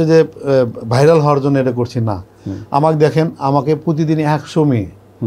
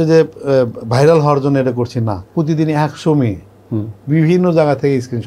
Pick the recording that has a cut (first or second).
second